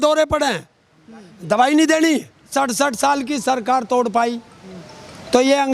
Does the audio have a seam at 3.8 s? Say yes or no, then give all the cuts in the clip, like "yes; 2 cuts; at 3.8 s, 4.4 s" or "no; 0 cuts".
no; 1 cut; at 2.5 s